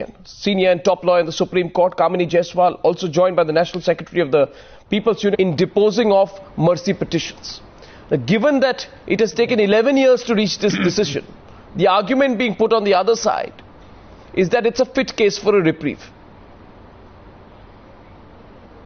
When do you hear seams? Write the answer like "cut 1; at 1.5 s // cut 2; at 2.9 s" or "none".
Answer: none